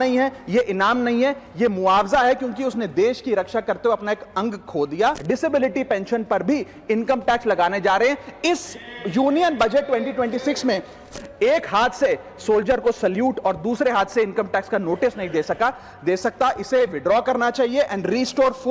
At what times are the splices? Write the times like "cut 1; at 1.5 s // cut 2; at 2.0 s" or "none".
cut 1; at 5.2 s // cut 2; at 11.1 s